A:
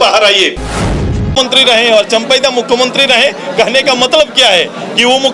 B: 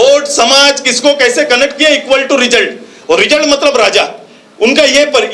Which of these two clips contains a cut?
A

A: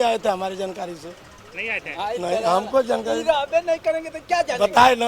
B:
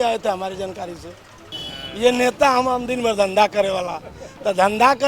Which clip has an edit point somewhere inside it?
B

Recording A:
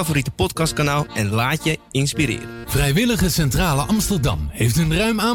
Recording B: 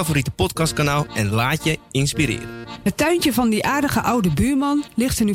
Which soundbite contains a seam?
B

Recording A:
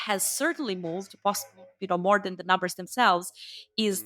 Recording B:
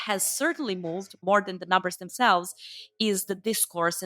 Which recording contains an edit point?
B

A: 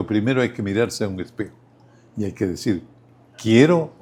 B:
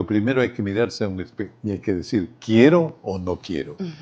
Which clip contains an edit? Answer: B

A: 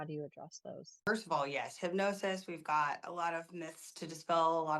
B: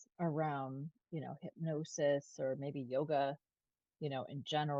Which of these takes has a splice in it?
A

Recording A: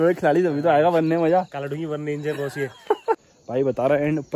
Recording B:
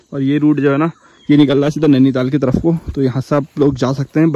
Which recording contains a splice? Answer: A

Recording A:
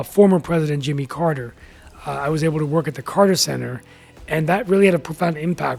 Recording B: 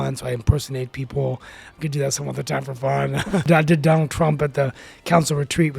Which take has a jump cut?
B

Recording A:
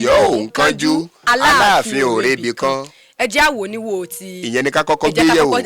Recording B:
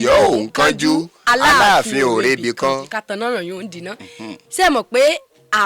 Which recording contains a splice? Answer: B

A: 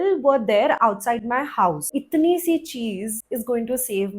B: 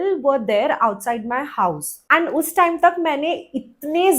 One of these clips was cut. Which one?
A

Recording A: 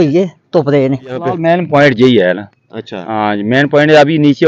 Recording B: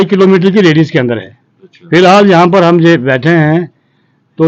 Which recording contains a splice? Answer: A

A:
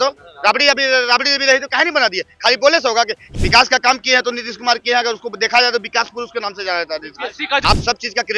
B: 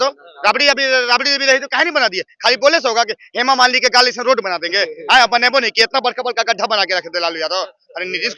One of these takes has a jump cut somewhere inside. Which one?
A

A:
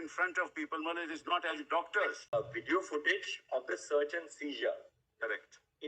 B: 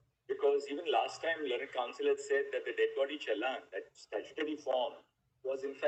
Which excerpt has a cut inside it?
A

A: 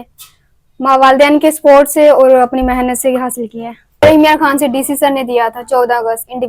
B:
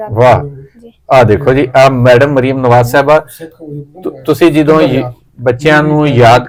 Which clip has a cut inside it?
A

